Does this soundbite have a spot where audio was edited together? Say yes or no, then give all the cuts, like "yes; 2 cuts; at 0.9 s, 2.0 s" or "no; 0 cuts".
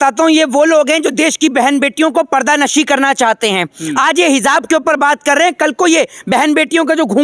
no; 0 cuts